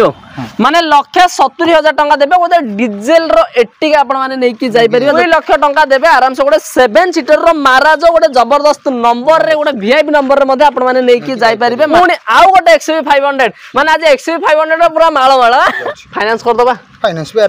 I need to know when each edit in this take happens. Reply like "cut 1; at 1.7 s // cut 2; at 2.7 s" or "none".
cut 1; at 5.2 s // cut 2; at 11.9 s // cut 3; at 15.8 s

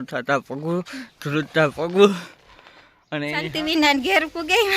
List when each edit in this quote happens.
cut 1; at 3.2 s

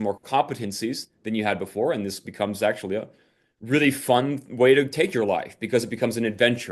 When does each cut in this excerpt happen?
none

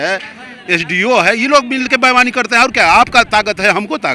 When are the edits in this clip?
none

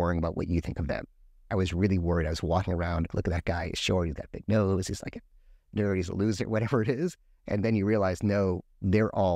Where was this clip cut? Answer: cut 1; at 1.4 s // cut 2; at 3.1 s

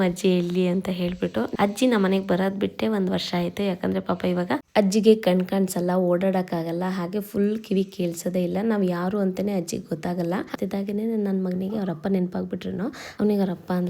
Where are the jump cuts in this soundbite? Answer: cut 1; at 1.5 s // cut 2; at 4.7 s // cut 3; at 10.5 s // cut 4; at 13.1 s

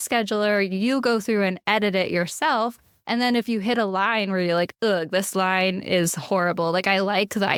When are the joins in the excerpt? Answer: none

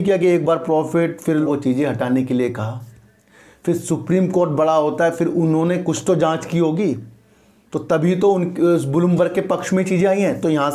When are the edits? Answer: cut 1; at 1.3 s

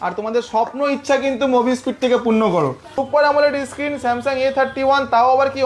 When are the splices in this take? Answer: cut 1; at 2.9 s

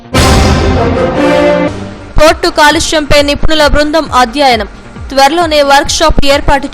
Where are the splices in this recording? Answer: cut 1; at 1.7 s

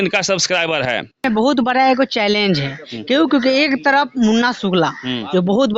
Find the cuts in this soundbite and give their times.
cut 1; at 1.2 s

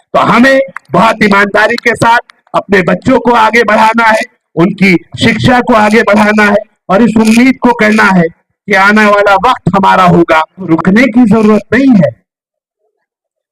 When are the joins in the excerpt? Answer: cut 1; at 10.7 s

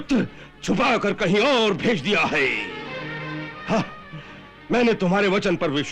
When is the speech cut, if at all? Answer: none

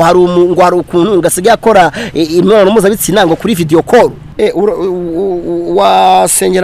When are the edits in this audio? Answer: cut 1; at 4.2 s

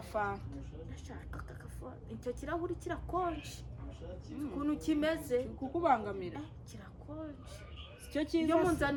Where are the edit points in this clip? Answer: none

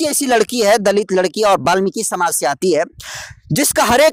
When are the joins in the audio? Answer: none

